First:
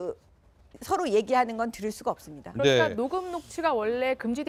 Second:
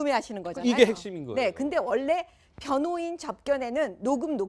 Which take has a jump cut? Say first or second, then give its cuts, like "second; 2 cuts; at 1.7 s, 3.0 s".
second; 1 cut; at 3.3 s